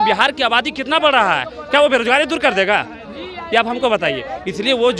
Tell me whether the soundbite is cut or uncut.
uncut